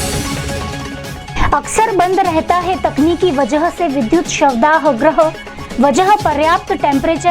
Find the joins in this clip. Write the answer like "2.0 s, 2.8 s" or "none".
1.3 s